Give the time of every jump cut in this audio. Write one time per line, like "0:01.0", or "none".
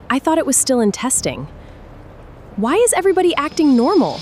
none